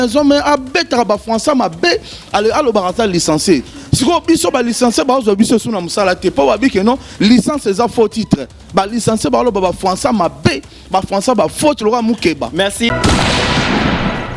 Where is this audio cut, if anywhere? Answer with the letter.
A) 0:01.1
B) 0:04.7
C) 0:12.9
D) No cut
C